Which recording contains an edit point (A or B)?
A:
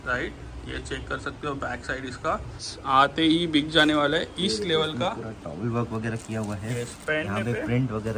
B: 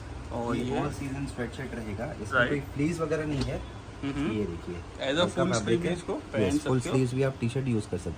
A